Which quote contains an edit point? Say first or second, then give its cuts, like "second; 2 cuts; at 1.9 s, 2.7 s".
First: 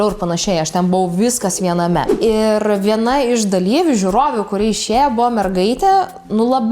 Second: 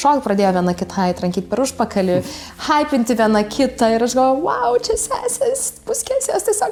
first; 1 cut; at 2.1 s